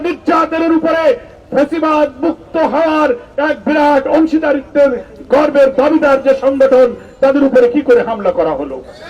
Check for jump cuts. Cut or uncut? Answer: uncut